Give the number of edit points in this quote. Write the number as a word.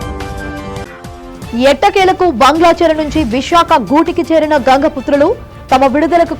one